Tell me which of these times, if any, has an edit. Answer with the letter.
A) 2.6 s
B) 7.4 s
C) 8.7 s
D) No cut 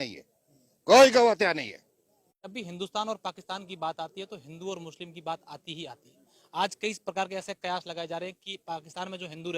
A